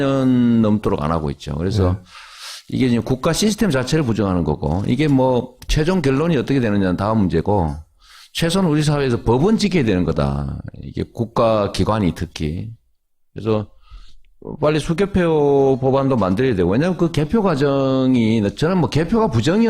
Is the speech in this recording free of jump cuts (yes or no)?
no